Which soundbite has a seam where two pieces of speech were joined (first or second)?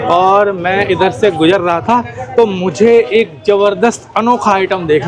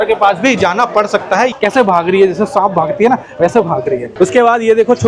second